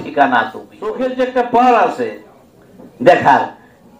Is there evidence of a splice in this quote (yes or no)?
yes